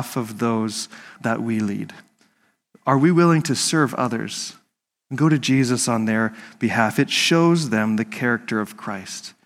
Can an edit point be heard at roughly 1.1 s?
yes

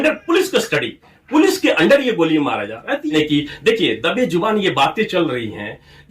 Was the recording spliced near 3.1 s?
yes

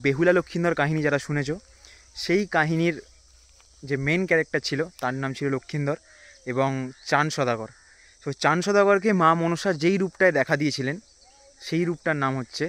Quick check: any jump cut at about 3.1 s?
no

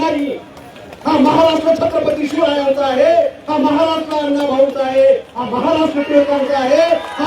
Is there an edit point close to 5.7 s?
no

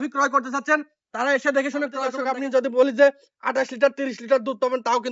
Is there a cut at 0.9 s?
no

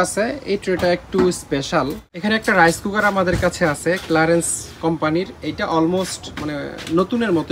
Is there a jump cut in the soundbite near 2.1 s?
yes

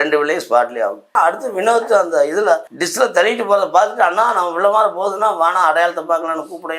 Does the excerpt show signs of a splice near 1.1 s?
yes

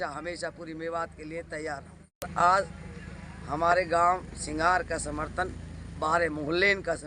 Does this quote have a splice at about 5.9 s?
no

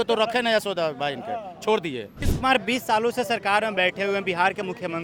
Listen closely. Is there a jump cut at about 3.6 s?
no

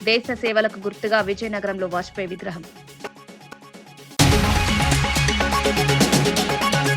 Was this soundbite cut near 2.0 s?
no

